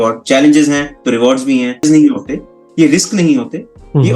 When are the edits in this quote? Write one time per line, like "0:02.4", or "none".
0:01.8